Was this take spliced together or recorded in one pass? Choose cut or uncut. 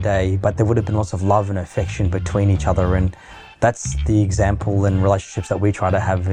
uncut